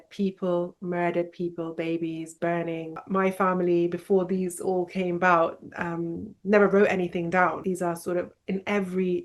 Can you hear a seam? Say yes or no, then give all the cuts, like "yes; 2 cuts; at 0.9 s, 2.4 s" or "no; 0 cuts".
yes; 2 cuts; at 3.0 s, 7.6 s